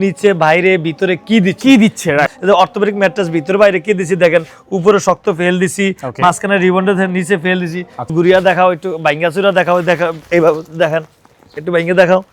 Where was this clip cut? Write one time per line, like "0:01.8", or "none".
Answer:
0:02.3
0:08.1